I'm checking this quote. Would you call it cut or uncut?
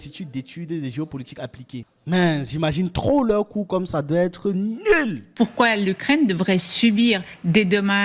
cut